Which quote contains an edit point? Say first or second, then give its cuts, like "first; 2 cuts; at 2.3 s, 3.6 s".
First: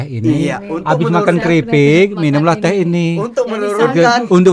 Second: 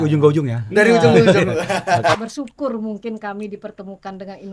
second; 1 cut; at 2.2 s